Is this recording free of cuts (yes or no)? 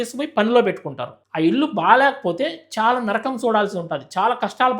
no